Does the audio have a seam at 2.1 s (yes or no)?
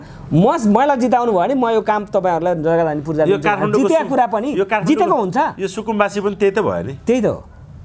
no